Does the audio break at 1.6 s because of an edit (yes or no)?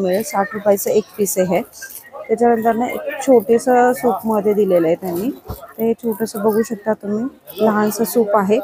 no